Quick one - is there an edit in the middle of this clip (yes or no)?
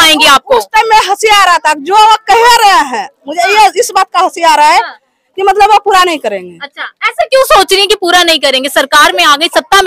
no